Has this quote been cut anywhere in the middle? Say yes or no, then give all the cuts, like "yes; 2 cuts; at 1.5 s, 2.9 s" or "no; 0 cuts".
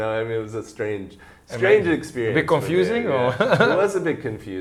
no; 0 cuts